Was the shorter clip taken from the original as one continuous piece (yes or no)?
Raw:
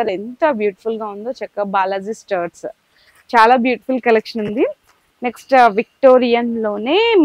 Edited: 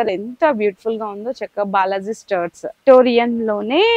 no